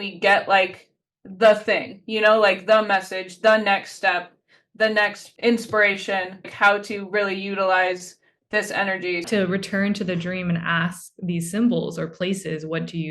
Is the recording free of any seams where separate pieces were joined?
no; 3 cuts; at 5.2 s, 6.5 s, 9.3 s

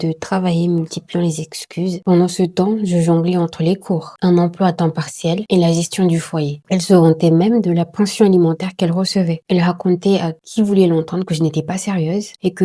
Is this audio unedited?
no; 3 cuts; at 2.0 s, 6.6 s, 9.4 s

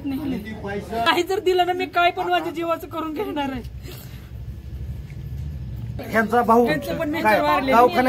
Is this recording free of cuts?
no; 2 cuts; at 1.1 s, 6.0 s

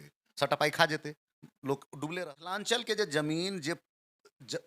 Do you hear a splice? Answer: yes; 1 cut; at 2.2 s

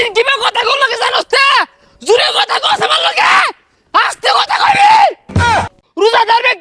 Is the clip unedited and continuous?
no; 1 cut; at 5.6 s

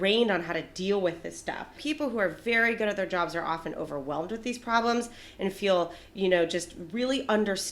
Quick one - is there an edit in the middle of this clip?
yes; 1 cut; at 1.8 s

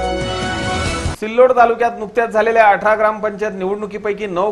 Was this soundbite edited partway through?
no; 0 cuts

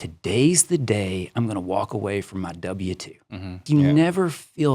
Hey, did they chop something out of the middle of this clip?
yes; 1 cut; at 3.6 s

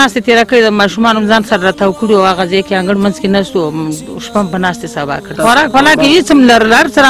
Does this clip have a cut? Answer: yes; 1 cut; at 5.4 s

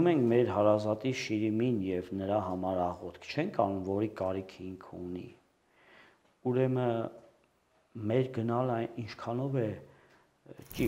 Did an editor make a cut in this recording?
no; 0 cuts

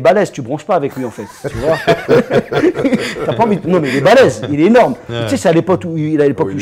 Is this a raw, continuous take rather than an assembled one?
yes; 0 cuts

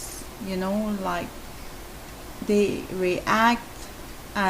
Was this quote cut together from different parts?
no; 0 cuts

